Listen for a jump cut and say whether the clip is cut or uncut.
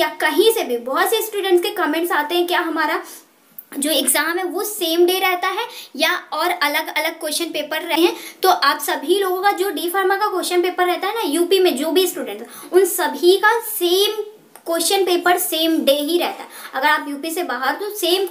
uncut